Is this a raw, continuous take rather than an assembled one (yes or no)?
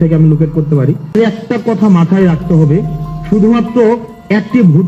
no